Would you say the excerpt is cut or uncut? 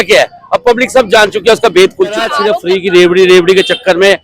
cut